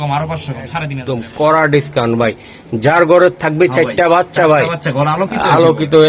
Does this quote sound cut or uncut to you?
cut